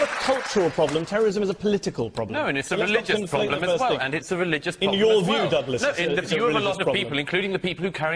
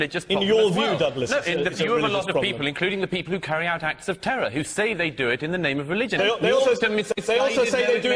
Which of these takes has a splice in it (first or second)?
first